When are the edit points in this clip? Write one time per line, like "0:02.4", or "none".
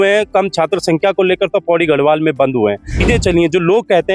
0:03.0